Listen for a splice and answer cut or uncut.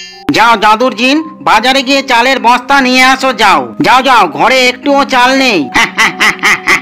uncut